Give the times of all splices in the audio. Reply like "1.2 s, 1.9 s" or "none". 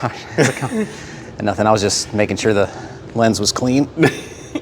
none